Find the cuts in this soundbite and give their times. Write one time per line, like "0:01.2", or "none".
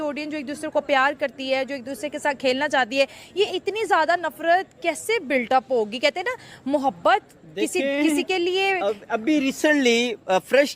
0:09.5